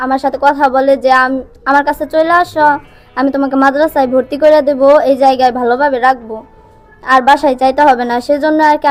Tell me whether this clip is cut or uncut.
uncut